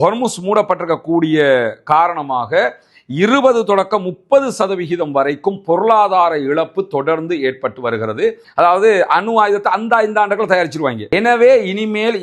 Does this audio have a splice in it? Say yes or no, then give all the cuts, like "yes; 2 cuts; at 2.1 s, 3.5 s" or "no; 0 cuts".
yes; 1 cut; at 8.4 s